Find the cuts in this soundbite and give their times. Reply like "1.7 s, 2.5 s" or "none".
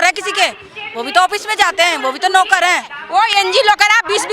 3.0 s